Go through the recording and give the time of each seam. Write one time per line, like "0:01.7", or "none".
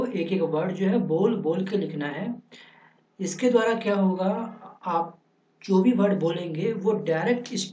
none